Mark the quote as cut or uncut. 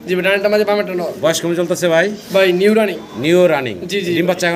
uncut